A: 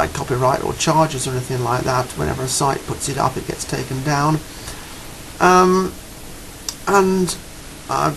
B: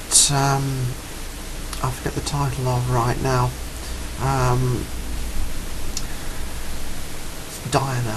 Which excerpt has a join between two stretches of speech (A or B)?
A